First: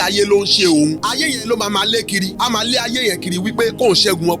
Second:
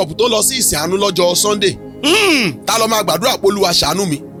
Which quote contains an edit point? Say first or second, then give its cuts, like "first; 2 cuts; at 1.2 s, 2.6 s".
first; 2 cuts; at 1.0 s, 2.3 s